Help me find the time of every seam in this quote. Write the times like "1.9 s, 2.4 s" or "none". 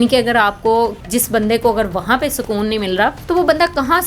1.0 s, 3.2 s